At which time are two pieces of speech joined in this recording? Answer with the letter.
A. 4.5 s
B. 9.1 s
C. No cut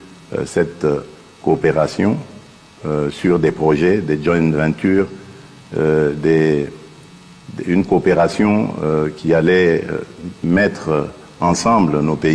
C